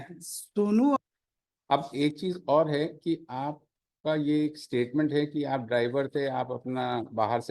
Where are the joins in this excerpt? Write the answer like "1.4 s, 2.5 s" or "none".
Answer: 1.0 s

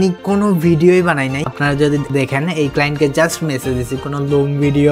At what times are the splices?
1.8 s

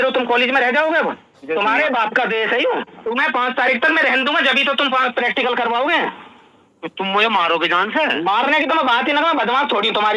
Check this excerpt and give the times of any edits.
1.4 s, 3.0 s

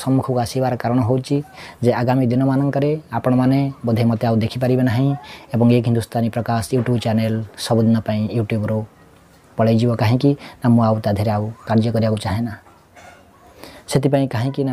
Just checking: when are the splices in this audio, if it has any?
none

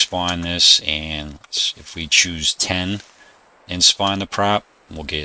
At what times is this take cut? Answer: none

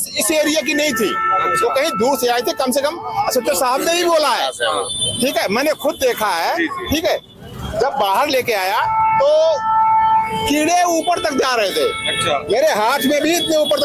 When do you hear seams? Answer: none

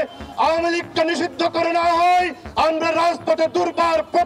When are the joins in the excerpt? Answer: 2.4 s

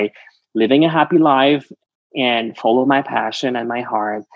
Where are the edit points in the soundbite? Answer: none

